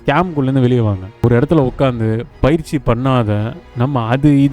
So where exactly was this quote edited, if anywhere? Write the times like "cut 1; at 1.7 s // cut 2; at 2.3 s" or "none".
cut 1; at 1.2 s